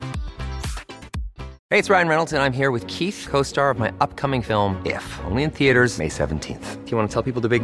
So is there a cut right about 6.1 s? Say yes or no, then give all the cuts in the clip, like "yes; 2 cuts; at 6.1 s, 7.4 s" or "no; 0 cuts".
no; 1 cut; at 1.5 s